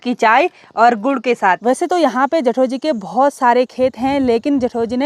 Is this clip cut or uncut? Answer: cut